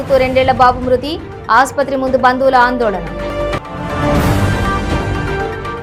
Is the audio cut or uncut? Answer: uncut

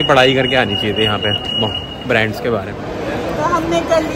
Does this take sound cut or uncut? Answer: uncut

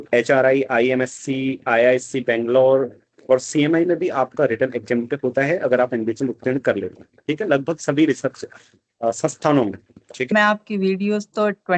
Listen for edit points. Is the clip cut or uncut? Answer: cut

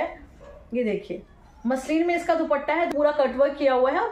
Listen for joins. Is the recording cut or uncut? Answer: cut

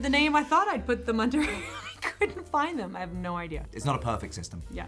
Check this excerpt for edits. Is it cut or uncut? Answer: cut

